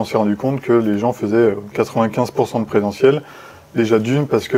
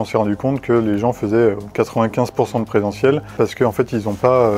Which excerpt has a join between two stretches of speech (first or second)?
second